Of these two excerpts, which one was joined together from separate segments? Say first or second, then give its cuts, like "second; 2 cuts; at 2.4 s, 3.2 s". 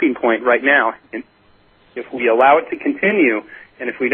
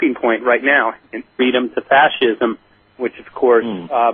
first; 1 cut; at 1.3 s